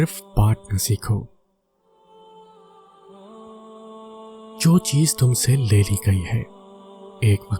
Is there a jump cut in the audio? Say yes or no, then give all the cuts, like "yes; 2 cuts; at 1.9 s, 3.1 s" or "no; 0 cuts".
yes; 2 cuts; at 1.3 s, 4.1 s